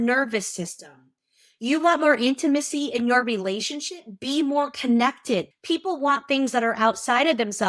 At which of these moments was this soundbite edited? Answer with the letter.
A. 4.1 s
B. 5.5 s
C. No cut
B